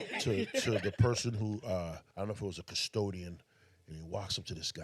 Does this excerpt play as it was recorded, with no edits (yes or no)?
no